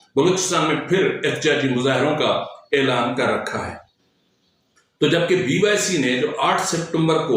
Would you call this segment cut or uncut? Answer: uncut